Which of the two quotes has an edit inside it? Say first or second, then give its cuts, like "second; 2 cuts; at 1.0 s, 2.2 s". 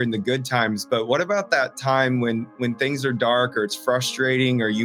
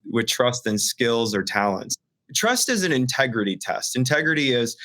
second; 1 cut; at 1.7 s